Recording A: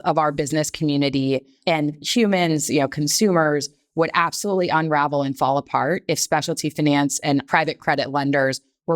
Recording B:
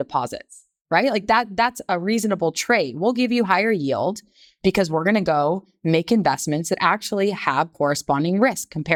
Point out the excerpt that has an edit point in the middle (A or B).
A